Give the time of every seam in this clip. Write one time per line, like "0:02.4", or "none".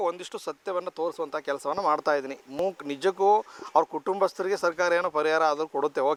none